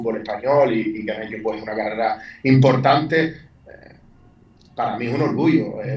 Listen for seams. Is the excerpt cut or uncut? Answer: uncut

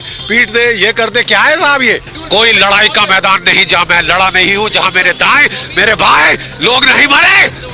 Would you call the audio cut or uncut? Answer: cut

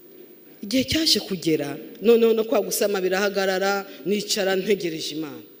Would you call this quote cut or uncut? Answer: uncut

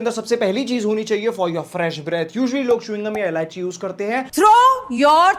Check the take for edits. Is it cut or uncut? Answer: uncut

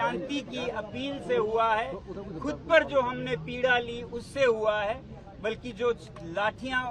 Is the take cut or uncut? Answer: uncut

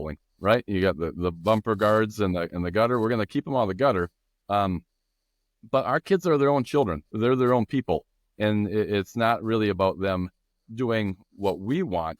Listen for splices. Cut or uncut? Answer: uncut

